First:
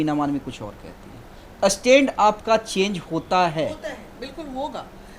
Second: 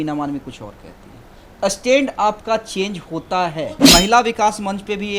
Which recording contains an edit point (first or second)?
second